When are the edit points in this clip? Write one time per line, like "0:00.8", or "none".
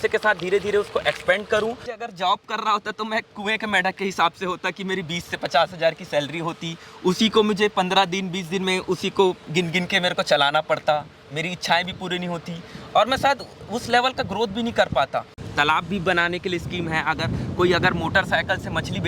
0:01.9
0:15.4